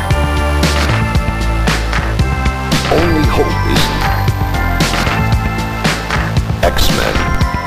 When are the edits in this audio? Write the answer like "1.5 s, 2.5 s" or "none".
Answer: none